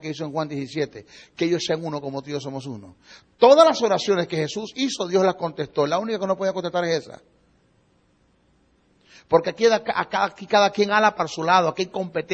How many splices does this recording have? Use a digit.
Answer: 1